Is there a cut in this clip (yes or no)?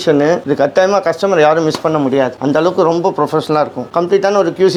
no